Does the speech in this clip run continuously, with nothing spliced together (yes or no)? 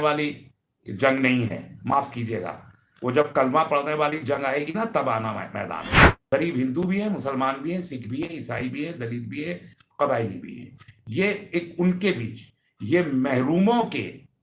no